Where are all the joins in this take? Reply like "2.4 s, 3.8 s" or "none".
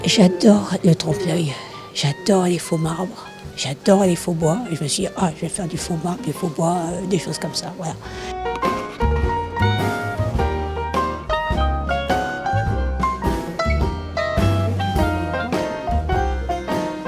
none